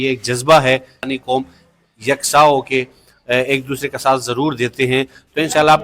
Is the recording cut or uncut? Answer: cut